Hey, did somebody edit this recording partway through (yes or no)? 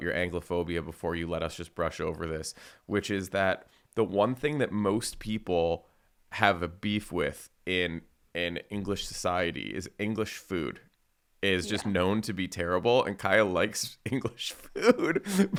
no